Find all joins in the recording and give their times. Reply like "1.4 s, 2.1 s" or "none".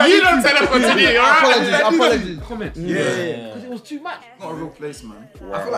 2.4 s, 4.4 s